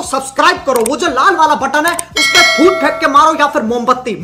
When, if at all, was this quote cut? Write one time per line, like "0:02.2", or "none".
none